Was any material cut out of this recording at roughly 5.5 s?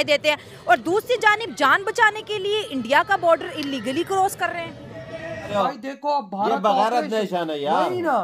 yes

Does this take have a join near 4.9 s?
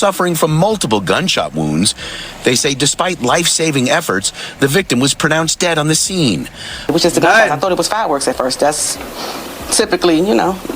no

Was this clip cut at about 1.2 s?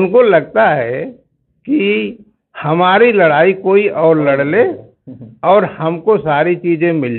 no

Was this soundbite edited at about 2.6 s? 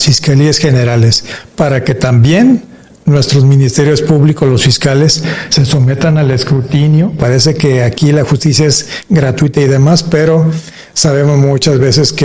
no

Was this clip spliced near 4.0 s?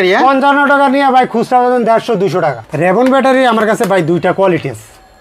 no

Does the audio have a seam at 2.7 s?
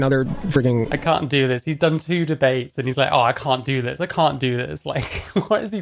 no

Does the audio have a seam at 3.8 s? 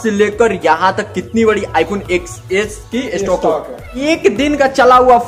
yes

